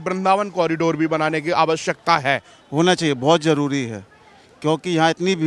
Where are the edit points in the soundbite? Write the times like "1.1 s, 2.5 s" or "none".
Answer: 2.5 s